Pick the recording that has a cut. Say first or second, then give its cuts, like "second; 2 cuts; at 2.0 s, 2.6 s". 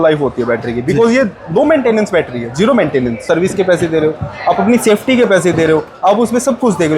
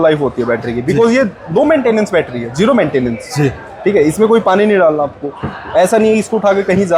first; 1 cut; at 3.2 s